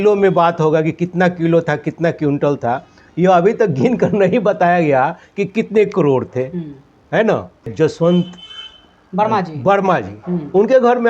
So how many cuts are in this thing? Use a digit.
1